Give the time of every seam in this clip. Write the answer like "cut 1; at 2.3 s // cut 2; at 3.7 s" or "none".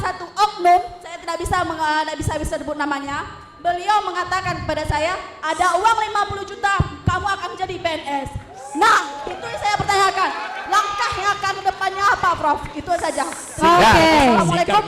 none